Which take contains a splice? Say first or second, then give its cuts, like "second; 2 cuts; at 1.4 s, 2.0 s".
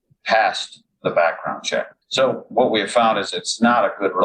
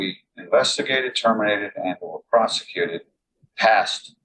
first; 1 cut; at 2.0 s